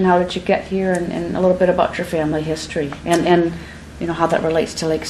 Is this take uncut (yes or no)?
no